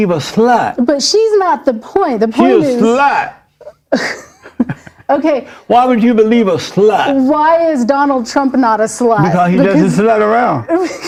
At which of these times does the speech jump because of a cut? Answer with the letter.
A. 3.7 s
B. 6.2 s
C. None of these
C